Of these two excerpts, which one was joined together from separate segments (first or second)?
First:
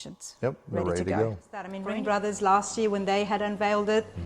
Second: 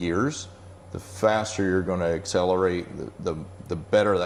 first